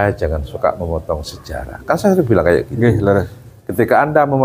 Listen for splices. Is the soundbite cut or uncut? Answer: uncut